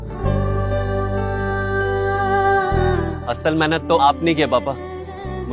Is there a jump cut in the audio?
yes; 1 cut; at 2.9 s

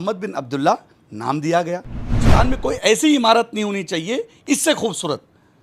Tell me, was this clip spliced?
yes; 1 cut; at 2.2 s

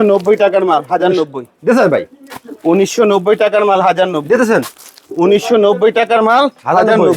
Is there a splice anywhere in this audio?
no; 0 cuts

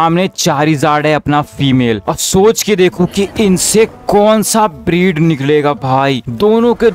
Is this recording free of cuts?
yes; 0 cuts

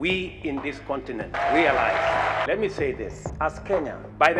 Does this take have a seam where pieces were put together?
yes; 2 cuts; at 1.3 s, 2.4 s

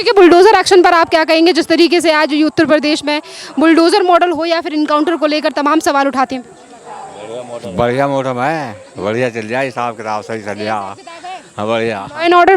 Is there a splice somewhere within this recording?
no; 0 cuts

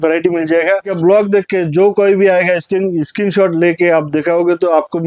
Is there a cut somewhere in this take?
yes; 1 cut; at 0.9 s

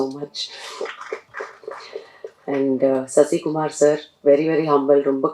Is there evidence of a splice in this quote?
no; 0 cuts

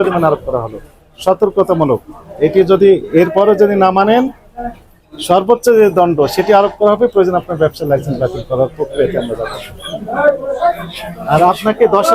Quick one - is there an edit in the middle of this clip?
no; 0 cuts

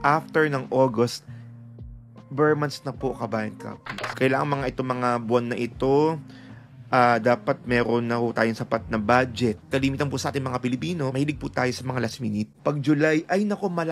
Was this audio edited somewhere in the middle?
yes; 2 cuts; at 4.1 s, 9.6 s

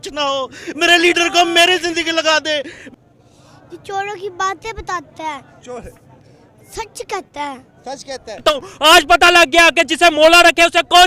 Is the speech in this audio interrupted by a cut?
yes; 2 cuts; at 2.8 s, 8.6 s

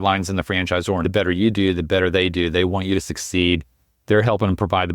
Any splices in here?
yes; 1 cut; at 1.0 s

